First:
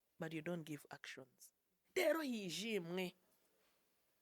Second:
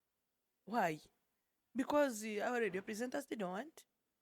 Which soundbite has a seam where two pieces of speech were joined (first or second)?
first